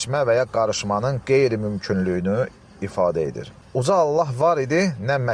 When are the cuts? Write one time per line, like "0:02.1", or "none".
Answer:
0:03.6